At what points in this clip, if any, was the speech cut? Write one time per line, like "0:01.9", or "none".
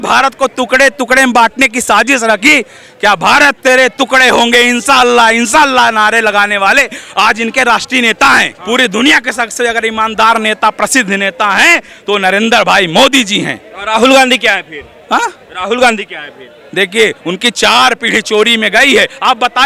0:08.5